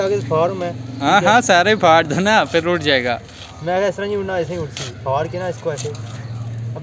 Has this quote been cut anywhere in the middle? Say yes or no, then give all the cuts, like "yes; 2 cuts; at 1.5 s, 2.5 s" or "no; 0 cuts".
no; 0 cuts